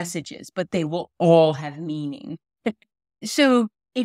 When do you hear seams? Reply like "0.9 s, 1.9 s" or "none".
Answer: none